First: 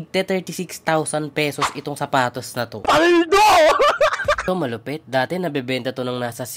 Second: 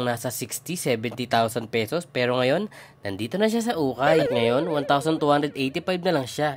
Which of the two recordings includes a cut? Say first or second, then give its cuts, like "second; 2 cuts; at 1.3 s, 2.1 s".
first; 1 cut; at 4.4 s